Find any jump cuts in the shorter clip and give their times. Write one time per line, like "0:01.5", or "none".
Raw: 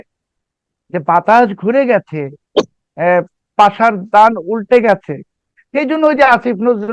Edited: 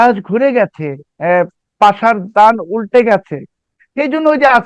0:01.0